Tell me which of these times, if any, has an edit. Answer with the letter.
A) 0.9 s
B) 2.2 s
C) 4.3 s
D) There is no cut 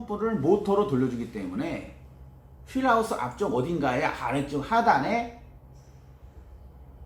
D